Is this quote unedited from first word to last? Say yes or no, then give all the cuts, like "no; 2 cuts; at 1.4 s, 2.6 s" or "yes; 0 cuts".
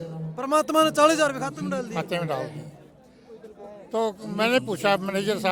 yes; 0 cuts